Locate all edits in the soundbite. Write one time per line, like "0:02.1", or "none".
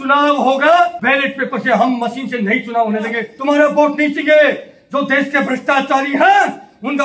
0:01.0
0:03.3